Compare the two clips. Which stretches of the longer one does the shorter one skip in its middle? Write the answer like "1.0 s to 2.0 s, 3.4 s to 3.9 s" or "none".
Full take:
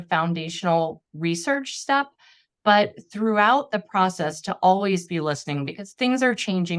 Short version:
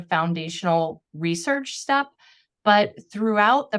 none